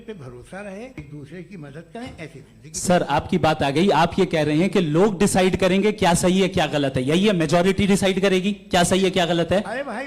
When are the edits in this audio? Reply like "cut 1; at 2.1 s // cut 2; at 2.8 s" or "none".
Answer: cut 1; at 1.0 s

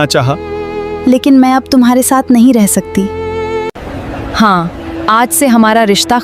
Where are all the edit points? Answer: cut 1; at 3.7 s

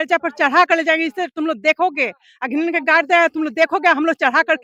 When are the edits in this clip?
none

